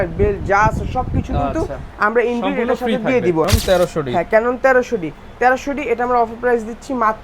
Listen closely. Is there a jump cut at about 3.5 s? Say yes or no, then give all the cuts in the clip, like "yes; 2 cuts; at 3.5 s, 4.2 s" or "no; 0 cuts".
yes; 1 cut; at 3.5 s